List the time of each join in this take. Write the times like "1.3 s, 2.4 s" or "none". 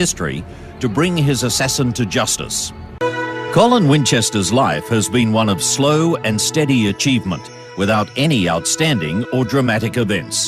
8.1 s